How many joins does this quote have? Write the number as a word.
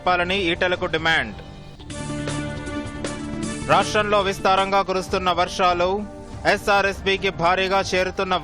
zero